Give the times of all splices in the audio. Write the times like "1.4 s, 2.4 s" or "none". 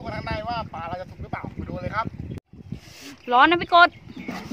none